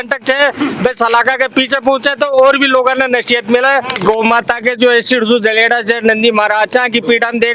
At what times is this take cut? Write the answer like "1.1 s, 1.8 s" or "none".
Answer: 4.0 s